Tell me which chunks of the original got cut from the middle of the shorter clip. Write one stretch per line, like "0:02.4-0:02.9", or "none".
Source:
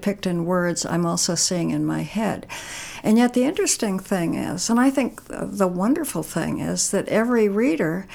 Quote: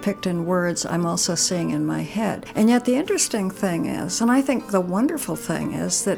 0:02.4-0:02.9
0:05.1-0:05.5